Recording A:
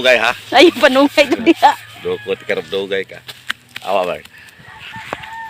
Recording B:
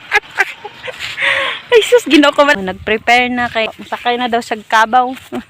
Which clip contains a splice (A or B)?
B